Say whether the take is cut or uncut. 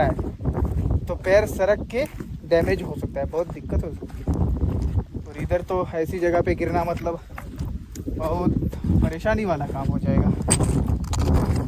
uncut